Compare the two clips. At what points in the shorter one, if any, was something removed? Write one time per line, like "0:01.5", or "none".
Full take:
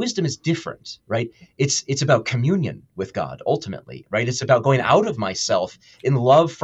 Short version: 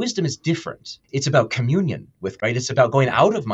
0:01.0
0:02.2